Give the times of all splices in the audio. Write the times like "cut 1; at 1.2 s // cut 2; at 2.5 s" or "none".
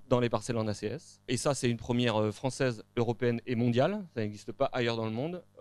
cut 1; at 1.3 s